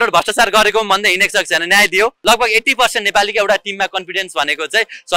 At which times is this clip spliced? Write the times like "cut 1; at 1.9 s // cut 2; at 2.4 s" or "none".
cut 1; at 2.2 s